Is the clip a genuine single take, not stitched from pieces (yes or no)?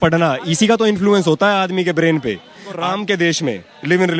no